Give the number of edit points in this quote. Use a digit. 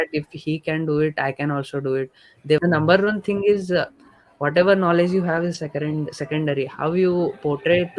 1